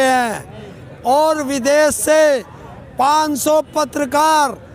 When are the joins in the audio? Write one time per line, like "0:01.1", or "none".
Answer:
none